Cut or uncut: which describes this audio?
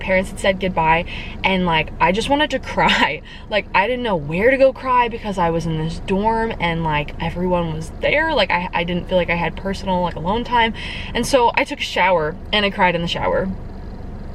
uncut